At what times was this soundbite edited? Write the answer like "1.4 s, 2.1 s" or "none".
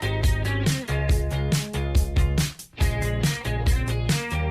1.3 s